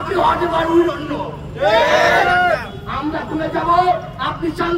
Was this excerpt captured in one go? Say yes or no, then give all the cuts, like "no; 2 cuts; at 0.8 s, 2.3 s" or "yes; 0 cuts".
yes; 0 cuts